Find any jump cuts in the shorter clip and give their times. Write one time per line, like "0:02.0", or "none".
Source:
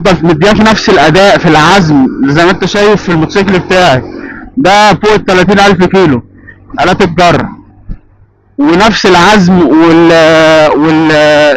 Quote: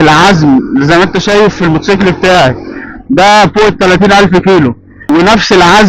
0:04.9